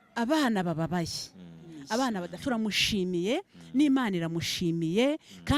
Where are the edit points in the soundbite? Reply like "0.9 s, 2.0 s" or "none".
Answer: 2.3 s